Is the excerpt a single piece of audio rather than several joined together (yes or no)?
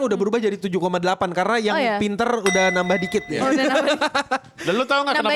yes